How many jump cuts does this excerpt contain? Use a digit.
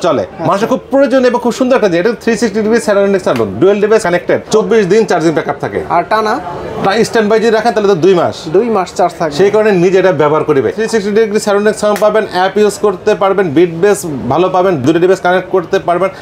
2